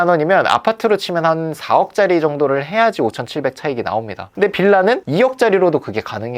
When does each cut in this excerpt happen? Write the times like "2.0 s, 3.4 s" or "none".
4.2 s